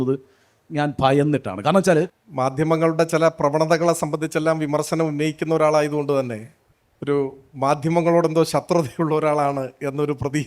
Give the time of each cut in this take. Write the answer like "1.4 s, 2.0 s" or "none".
2.2 s